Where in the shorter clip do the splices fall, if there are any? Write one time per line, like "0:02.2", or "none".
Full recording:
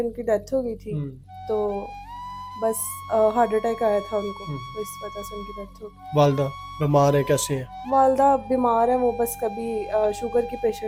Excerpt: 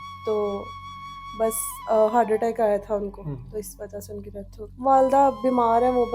0:04.7